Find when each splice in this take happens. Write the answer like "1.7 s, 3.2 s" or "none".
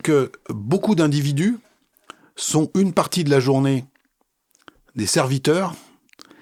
none